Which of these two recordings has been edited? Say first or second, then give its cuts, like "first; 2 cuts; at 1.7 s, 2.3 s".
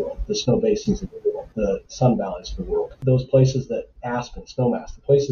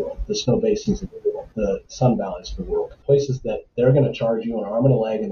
second; 1 cut; at 2.9 s